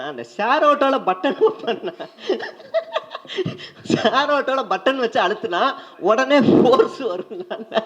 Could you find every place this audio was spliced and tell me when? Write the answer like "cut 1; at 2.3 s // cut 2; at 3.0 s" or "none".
none